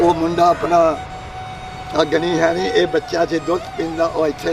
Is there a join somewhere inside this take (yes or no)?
no